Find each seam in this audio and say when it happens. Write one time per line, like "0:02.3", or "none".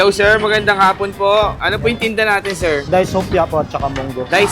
0:01.6